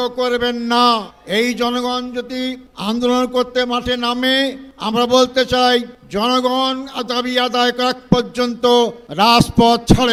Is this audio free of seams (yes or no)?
yes